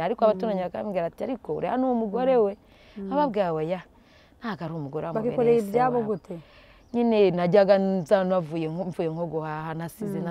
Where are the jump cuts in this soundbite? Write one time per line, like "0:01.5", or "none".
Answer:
none